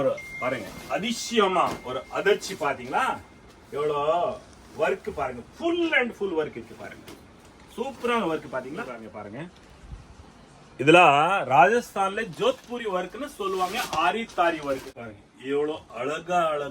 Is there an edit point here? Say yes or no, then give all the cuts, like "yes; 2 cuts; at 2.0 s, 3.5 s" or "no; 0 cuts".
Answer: yes; 2 cuts; at 9.0 s, 15.0 s